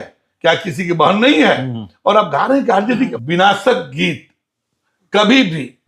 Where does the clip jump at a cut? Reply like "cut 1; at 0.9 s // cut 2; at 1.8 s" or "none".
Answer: cut 1; at 3.1 s